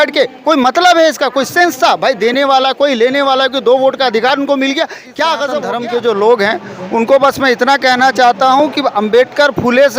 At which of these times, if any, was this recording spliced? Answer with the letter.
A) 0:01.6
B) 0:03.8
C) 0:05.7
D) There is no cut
C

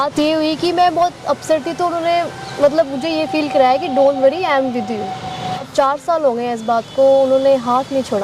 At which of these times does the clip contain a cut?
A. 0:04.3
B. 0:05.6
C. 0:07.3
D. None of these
B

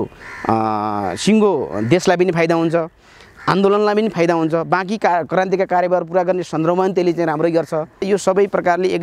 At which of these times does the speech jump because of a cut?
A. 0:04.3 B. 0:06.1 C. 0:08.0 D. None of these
C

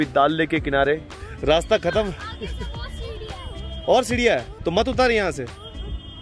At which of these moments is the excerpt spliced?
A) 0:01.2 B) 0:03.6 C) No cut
A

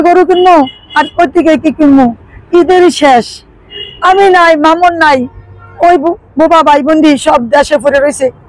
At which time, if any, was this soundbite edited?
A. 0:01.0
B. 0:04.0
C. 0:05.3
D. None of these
D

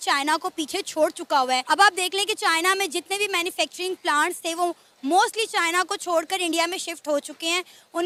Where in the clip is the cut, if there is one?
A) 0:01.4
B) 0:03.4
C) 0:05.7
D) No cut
D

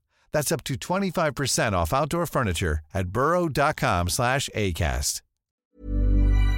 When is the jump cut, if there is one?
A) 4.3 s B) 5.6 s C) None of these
B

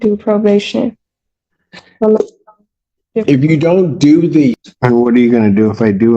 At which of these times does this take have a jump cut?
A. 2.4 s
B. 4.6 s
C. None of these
B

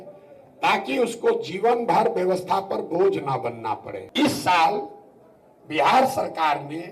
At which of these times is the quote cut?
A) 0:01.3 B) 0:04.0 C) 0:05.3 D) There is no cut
B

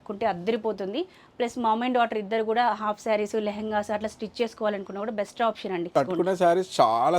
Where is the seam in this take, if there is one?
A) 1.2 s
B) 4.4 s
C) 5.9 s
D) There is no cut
C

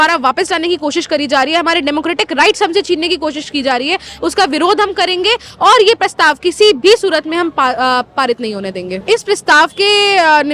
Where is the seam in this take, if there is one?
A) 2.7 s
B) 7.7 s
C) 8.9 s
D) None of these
C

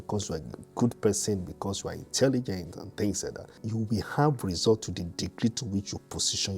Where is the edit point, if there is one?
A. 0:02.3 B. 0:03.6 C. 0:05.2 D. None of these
B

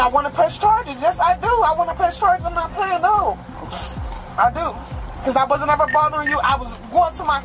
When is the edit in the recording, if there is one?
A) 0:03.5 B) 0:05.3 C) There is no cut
C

